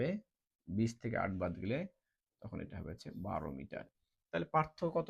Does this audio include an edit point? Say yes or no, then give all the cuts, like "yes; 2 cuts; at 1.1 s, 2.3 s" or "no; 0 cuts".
yes; 1 cut; at 4.0 s